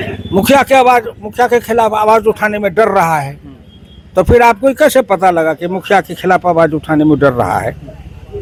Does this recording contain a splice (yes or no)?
no